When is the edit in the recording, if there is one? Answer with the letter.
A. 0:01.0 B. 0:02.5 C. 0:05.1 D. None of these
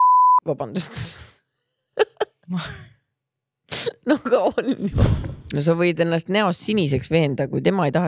C